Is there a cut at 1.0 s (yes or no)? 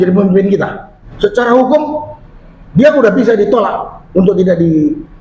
yes